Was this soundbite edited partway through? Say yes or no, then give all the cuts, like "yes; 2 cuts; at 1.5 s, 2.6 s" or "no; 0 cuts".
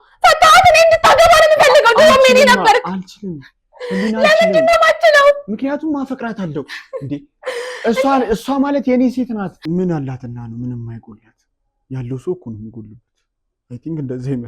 yes; 1 cut; at 9.5 s